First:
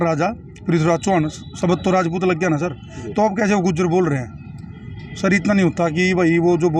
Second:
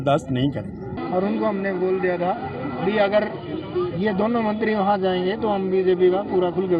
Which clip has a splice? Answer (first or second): second